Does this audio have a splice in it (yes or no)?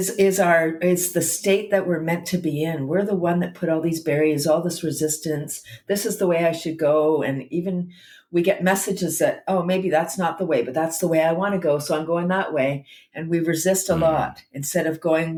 no